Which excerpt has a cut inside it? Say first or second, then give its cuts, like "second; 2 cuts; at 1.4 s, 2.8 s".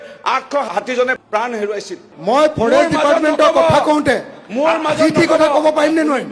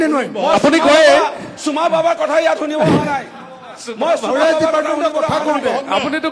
first; 1 cut; at 2.1 s